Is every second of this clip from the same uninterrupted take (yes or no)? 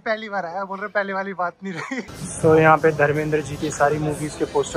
no